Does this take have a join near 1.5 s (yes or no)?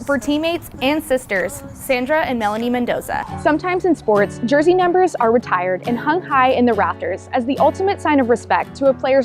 no